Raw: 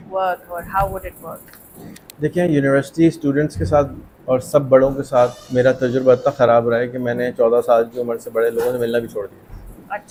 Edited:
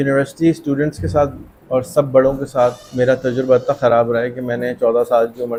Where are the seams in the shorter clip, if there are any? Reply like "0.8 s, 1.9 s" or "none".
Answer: none